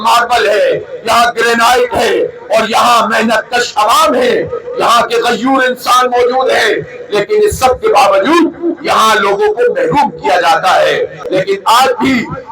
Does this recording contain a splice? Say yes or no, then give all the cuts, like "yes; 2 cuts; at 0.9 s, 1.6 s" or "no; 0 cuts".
yes; 1 cut; at 11.2 s